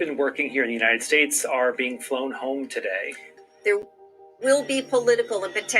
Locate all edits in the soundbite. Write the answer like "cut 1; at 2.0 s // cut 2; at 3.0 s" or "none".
cut 1; at 3.3 s